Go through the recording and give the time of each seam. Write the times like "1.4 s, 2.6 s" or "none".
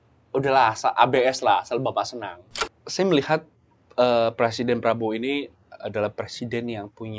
2.6 s